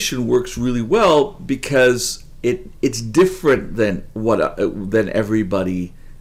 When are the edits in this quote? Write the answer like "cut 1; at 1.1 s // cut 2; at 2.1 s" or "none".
none